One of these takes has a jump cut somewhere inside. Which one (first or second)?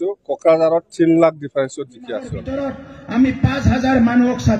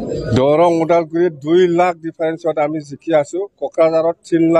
first